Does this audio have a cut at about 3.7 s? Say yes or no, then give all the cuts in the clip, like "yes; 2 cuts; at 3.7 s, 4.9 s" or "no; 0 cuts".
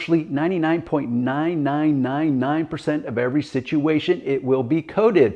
no; 0 cuts